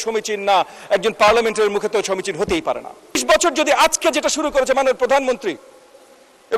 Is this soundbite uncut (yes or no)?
no